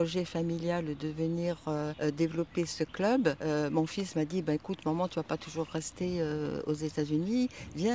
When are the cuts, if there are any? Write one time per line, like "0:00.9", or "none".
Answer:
0:01.9
0:03.4